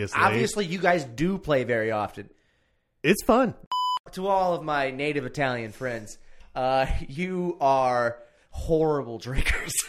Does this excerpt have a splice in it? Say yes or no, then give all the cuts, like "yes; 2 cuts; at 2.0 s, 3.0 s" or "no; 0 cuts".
yes; 1 cut; at 3.6 s